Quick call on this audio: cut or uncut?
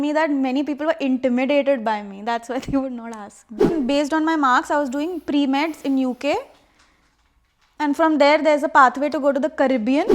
cut